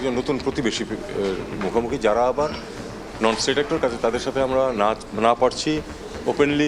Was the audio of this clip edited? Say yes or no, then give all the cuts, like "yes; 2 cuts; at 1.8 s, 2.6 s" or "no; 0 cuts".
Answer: no; 0 cuts